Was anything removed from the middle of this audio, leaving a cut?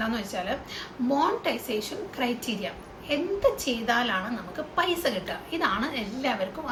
no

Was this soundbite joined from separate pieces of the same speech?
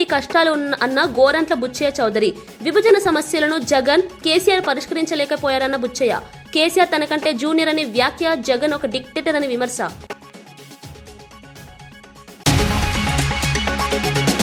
no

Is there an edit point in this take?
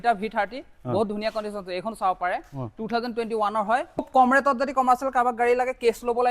yes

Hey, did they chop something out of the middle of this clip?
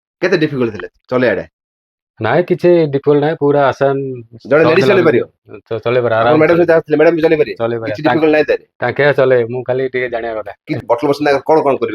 yes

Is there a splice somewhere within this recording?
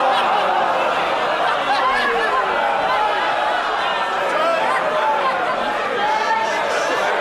no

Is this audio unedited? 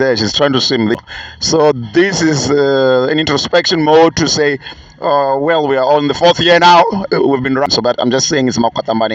no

